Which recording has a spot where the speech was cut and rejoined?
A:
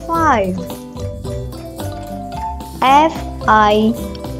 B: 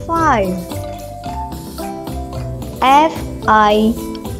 B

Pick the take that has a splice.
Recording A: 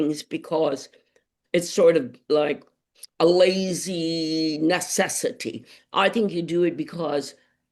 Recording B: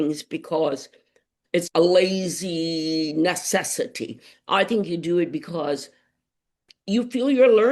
B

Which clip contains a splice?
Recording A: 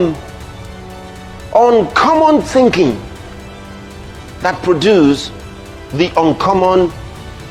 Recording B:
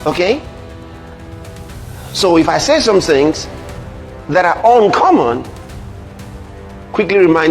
B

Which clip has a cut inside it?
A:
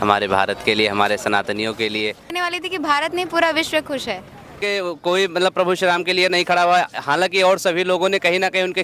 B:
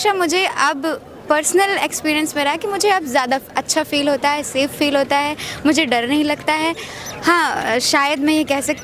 A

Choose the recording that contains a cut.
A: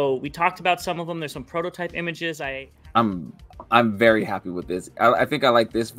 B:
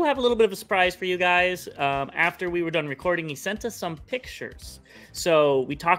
A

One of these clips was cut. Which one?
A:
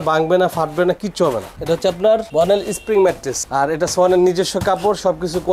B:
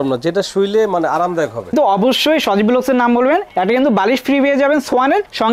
B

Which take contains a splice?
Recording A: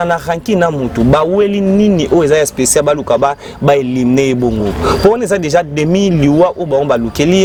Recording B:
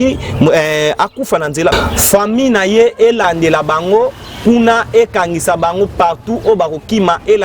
B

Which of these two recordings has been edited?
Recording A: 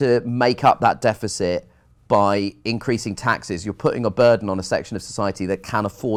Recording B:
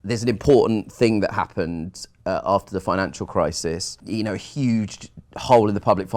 B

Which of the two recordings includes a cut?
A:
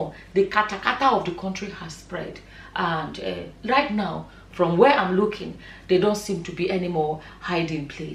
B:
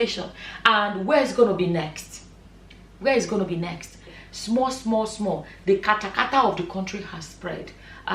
B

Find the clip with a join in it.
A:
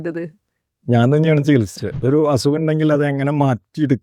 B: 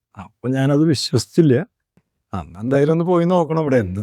A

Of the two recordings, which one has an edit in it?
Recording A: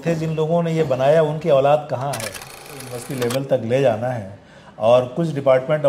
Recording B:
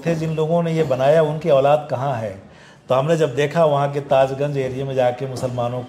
A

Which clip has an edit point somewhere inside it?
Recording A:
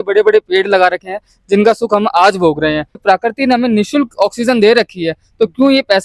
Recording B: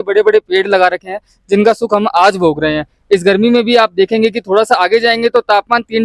A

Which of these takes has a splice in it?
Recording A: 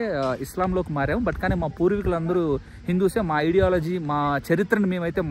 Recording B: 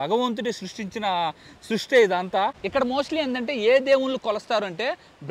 B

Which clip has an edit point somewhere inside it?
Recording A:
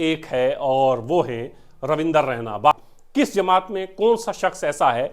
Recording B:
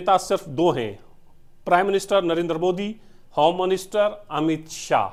A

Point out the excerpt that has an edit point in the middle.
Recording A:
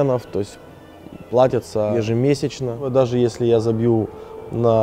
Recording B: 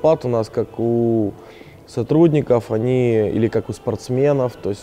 A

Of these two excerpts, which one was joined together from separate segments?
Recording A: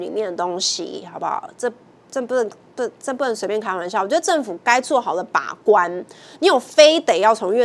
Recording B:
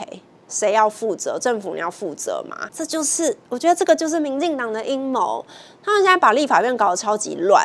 B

